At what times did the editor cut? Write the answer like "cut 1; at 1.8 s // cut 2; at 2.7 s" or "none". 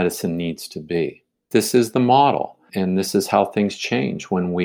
cut 1; at 1.4 s // cut 2; at 2.7 s